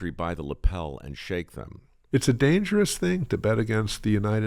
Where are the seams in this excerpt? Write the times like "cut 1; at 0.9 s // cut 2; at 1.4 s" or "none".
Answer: cut 1; at 2.0 s